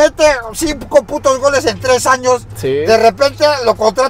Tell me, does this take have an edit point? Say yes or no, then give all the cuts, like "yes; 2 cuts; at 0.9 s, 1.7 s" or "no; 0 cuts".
no; 0 cuts